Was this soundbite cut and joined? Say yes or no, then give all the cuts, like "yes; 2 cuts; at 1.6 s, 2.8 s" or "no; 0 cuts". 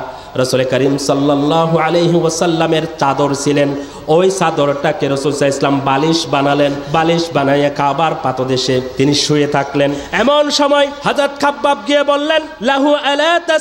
yes; 5 cuts; at 6.8 s, 8.9 s, 10.0 s, 11.0 s, 12.5 s